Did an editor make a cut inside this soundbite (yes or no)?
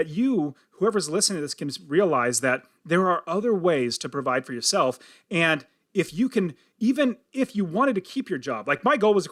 no